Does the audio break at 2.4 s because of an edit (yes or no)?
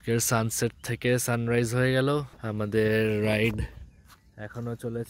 yes